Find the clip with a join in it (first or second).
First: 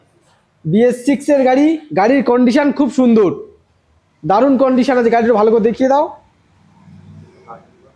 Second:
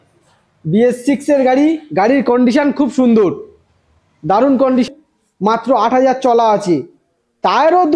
second